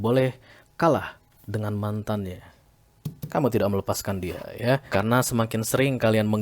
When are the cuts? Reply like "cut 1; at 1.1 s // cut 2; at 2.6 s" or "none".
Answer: cut 1; at 4.8 s